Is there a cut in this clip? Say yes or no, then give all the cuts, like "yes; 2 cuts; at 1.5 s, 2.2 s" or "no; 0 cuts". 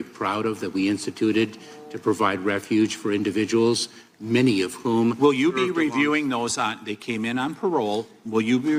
no; 0 cuts